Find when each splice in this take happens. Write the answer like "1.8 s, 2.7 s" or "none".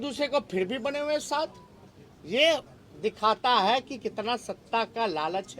none